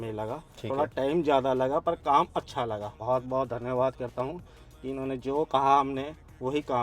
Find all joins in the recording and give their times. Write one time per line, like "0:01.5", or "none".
0:03.0